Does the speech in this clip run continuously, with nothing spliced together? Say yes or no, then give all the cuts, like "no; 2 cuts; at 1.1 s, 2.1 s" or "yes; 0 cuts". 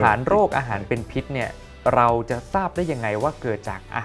yes; 0 cuts